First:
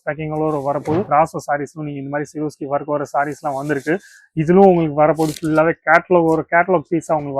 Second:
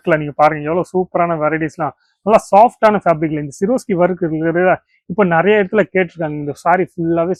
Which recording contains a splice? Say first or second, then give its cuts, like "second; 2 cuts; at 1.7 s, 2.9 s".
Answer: first; 1 cut; at 1.1 s